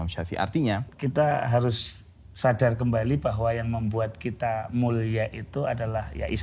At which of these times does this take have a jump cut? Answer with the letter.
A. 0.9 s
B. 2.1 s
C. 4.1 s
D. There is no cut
A